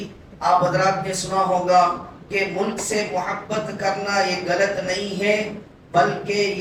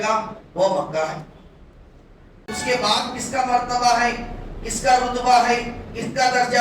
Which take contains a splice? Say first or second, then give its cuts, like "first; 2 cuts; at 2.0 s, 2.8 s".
second; 1 cut; at 2.4 s